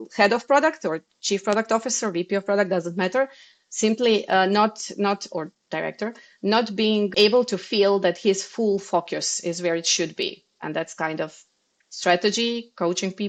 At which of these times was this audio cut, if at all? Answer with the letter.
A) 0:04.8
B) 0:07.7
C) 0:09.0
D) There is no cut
D